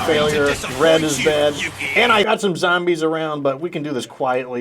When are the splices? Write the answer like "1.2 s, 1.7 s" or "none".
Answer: 2.3 s